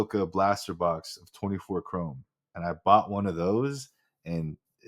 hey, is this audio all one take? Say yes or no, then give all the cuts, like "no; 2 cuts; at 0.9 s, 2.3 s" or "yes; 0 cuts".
yes; 0 cuts